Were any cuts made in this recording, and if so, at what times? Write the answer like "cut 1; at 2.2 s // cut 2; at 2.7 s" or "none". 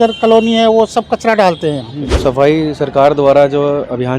cut 1; at 2.2 s